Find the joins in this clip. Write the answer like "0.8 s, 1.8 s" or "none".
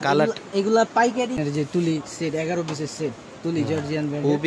1.4 s